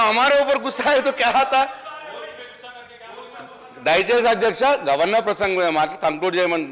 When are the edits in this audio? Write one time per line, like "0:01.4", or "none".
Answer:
none